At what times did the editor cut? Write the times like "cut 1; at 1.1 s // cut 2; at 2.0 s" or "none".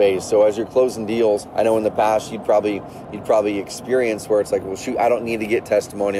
cut 1; at 1.5 s